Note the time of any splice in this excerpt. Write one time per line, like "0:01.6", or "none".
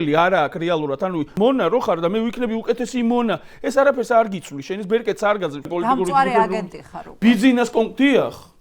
0:01.3
0:05.7